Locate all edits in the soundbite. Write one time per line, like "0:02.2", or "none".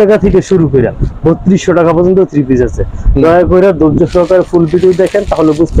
none